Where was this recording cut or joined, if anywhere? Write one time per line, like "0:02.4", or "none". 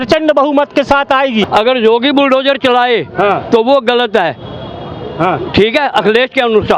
0:01.5